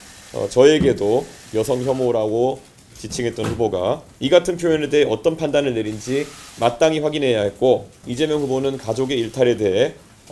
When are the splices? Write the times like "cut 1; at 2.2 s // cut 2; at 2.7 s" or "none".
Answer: cut 1; at 4.1 s // cut 2; at 8.0 s